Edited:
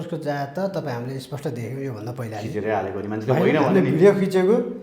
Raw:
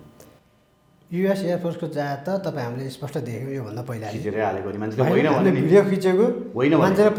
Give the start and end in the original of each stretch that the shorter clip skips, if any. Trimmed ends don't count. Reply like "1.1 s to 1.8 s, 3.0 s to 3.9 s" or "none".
none